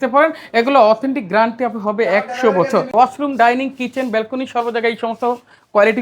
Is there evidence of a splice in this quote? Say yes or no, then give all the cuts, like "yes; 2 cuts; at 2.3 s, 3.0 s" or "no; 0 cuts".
yes; 1 cut; at 2.9 s